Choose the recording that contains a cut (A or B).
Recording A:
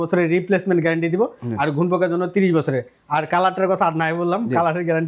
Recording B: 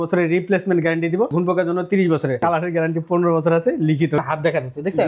B